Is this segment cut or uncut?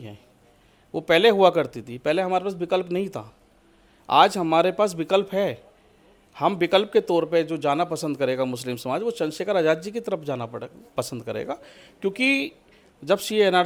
uncut